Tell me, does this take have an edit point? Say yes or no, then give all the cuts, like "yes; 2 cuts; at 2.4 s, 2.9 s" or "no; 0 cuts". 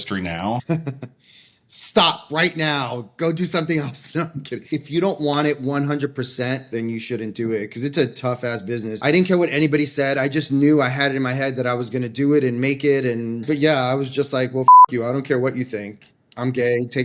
yes; 4 cuts; at 4.7 s, 6.7 s, 9.0 s, 13.4 s